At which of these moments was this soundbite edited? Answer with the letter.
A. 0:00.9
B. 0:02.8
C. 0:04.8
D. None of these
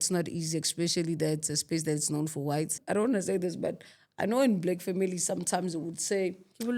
B